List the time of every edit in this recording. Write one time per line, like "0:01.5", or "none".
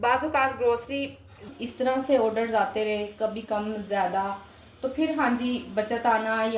0:01.4

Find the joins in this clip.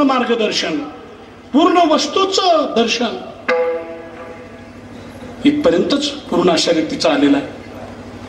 none

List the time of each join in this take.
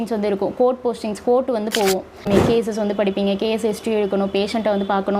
0:02.3

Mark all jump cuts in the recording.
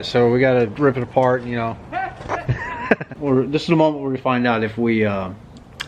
0:03.1

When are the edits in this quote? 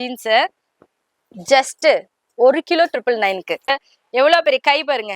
0:03.7

